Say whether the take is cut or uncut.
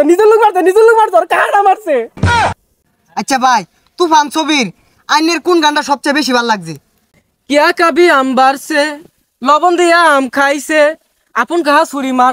cut